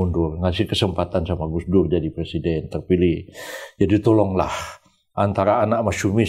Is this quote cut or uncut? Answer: uncut